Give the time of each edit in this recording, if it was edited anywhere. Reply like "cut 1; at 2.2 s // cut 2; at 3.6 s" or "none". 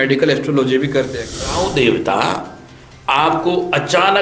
cut 1; at 1.2 s